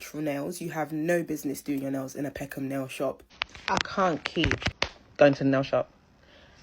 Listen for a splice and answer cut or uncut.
cut